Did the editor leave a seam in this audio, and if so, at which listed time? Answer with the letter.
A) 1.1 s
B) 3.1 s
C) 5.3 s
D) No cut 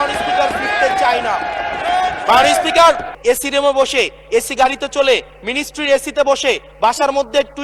B